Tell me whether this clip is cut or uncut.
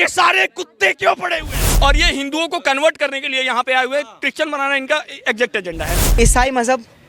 cut